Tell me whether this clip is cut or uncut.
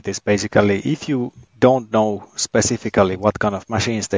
cut